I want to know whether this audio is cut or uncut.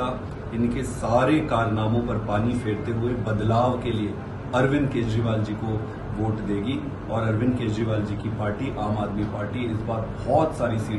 uncut